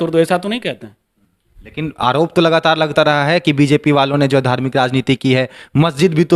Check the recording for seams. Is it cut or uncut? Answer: uncut